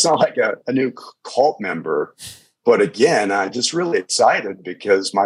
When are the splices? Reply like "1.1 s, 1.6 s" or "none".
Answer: none